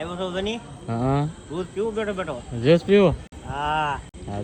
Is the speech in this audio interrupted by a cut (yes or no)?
no